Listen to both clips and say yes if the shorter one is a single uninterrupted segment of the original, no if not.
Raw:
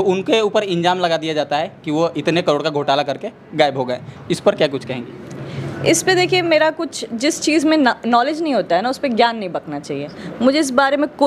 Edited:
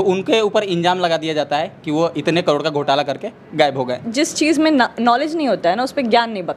no